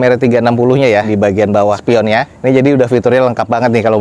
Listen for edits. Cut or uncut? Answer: uncut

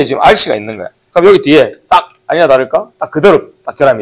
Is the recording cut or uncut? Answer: uncut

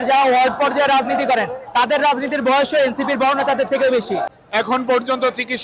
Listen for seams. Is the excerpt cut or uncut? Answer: cut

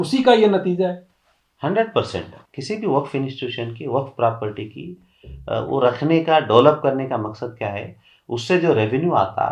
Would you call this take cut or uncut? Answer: cut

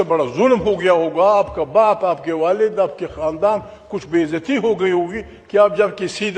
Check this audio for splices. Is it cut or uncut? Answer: uncut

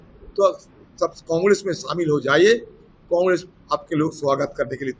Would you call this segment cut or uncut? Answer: uncut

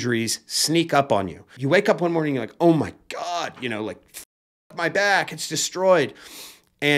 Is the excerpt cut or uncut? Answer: cut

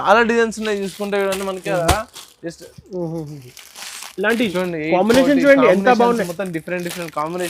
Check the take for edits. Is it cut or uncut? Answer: uncut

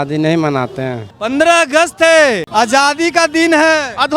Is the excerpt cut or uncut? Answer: cut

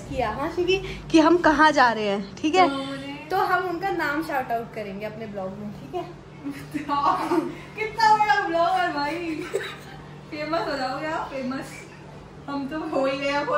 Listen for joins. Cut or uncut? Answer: uncut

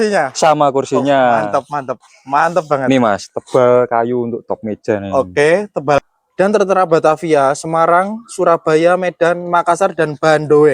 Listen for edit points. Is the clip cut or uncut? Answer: cut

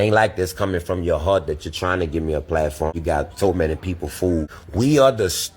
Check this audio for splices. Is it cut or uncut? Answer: cut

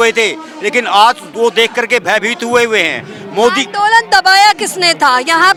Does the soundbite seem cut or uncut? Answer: uncut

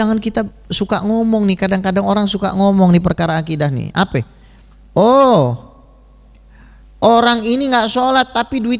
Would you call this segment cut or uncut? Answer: uncut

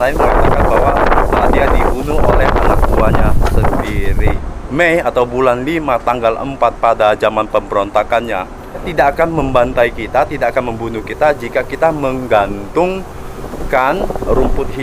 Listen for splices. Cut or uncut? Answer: cut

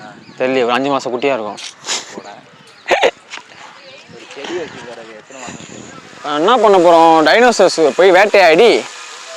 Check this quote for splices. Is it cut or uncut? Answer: cut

